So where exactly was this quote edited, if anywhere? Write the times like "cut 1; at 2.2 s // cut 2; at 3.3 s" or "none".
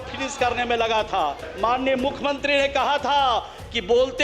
cut 1; at 1.5 s

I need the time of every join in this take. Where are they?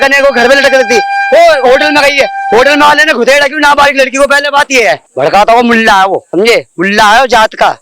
cut 1; at 5.1 s // cut 2; at 6.3 s

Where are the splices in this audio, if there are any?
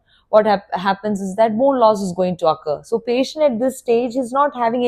none

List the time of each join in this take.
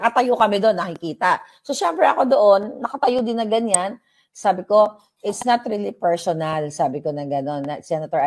none

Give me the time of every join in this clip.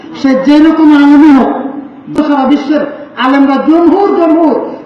cut 1; at 2.2 s

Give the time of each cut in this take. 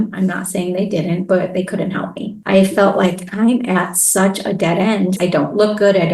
cut 1; at 2.4 s // cut 2; at 5.2 s

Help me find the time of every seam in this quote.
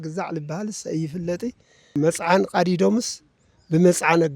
cut 1; at 1.9 s

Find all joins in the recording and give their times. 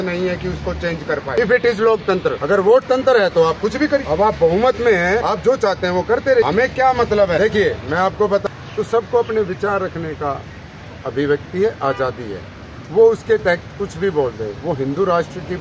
cut 1; at 1.4 s // cut 2; at 2.4 s // cut 3; at 4.0 s // cut 4; at 5.2 s // cut 5; at 6.5 s // cut 6; at 7.4 s // cut 7; at 8.4 s

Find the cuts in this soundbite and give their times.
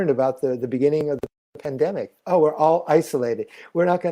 none

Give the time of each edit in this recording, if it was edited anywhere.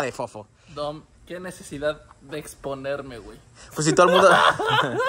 none

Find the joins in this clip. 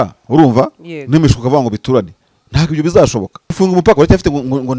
cut 1; at 3.6 s

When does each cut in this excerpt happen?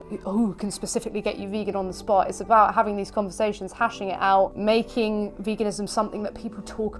none

